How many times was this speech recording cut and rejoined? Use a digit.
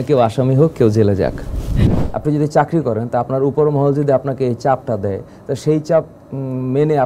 1